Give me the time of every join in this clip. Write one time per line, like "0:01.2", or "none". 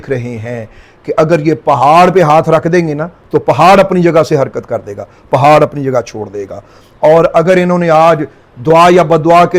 none